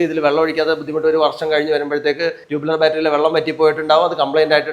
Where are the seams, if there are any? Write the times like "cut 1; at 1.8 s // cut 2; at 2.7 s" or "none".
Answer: cut 1; at 2.4 s